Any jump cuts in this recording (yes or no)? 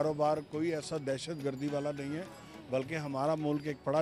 no